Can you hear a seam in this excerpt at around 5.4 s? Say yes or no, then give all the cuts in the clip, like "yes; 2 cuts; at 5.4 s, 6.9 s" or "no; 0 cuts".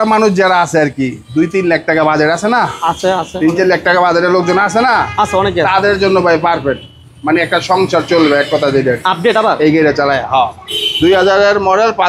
no; 0 cuts